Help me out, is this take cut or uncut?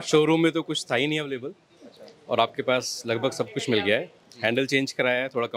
uncut